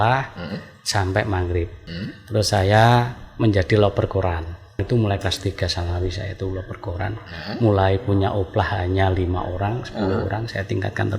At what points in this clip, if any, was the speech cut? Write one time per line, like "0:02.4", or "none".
0:01.8
0:04.8